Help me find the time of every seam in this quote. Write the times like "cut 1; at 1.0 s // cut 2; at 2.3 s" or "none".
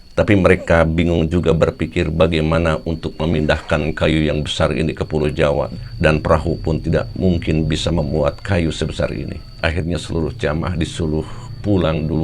cut 1; at 9.6 s